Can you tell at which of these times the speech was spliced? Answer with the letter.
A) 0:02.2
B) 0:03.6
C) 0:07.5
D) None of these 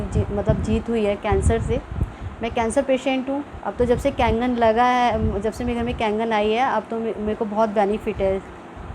B